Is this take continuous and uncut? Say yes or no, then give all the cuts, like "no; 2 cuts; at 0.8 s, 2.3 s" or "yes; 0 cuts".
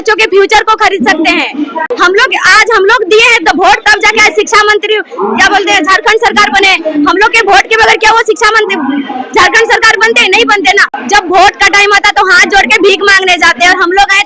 no; 2 cuts; at 1.9 s, 10.9 s